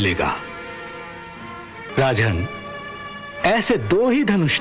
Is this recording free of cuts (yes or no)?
no